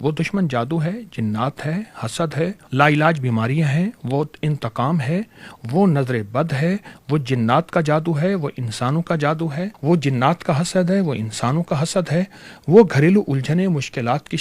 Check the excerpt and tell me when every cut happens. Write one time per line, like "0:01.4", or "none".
0:02.6
0:09.7